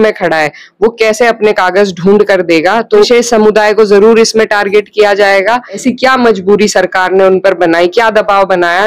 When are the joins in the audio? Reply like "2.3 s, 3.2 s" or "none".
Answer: 3.1 s, 5.8 s